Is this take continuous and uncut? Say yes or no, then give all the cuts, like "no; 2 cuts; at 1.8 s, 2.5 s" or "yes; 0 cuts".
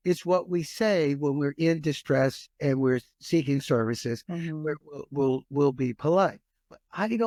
yes; 0 cuts